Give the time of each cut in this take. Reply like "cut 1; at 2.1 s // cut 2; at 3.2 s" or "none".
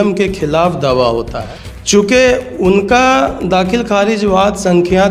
cut 1; at 1.3 s

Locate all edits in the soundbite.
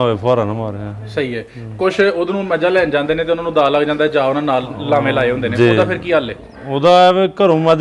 none

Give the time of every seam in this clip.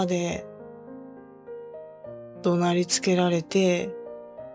cut 1; at 0.9 s // cut 2; at 2.4 s // cut 3; at 3.9 s

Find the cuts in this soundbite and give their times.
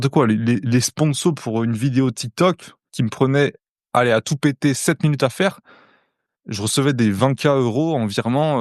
none

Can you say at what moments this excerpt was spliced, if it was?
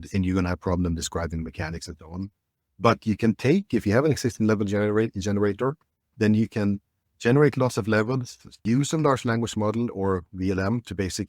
cut 1; at 8.6 s

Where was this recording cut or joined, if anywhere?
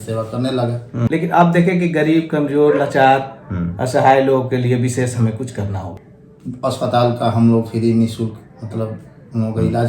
cut 1; at 1.1 s // cut 2; at 5.9 s

